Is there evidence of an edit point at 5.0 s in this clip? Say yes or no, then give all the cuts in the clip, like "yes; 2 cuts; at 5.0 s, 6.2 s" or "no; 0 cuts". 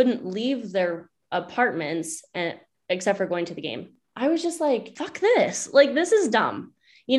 yes; 2 cuts; at 4.0 s, 5.0 s